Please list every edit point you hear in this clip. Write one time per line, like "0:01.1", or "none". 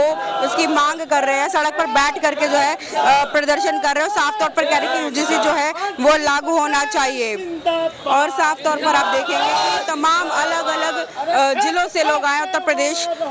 none